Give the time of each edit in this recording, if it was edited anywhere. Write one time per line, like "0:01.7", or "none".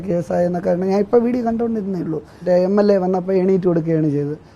0:02.4